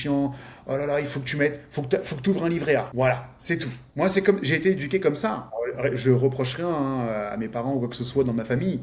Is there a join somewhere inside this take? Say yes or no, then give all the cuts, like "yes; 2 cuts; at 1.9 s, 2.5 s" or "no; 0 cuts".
yes; 3 cuts; at 2.9 s, 3.8 s, 5.5 s